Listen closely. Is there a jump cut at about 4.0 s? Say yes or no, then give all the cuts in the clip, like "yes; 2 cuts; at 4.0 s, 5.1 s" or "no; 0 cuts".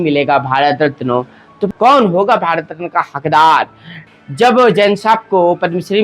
yes; 2 cuts; at 1.7 s, 4.0 s